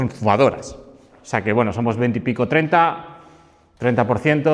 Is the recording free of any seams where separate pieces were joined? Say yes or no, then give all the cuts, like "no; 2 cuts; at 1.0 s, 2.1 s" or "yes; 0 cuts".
yes; 0 cuts